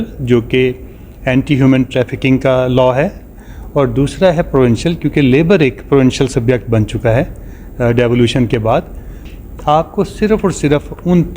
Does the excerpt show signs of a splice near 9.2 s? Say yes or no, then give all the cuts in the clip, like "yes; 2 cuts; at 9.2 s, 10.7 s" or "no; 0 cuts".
yes; 1 cut; at 9.2 s